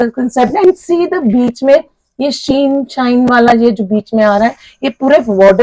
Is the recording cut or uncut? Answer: uncut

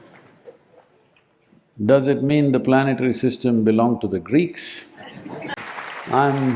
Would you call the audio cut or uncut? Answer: cut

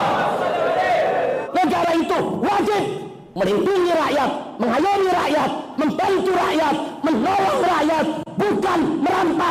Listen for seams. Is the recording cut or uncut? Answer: cut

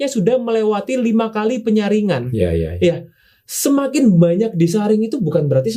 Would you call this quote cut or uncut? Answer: uncut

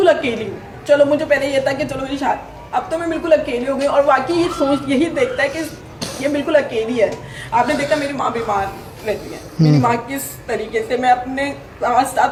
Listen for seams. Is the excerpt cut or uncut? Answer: uncut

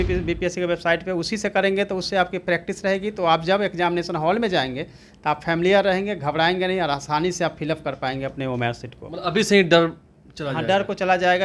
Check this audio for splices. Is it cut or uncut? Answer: uncut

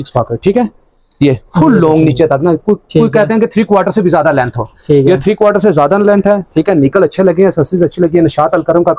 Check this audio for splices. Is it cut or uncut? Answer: uncut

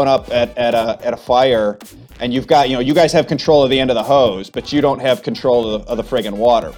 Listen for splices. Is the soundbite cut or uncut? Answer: cut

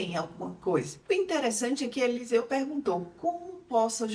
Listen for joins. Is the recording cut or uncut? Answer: uncut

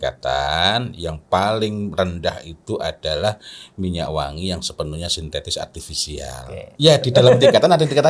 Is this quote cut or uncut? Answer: cut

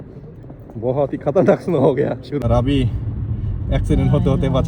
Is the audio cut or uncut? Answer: cut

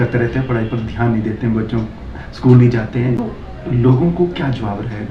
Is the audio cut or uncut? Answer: cut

